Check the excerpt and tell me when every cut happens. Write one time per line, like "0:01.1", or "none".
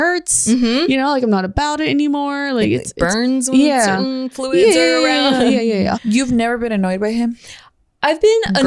0:06.0